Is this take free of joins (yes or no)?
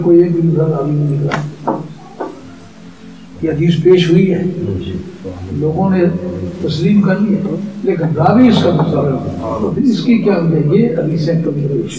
no